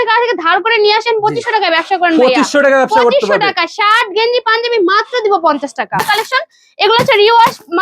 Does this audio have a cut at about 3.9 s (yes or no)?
no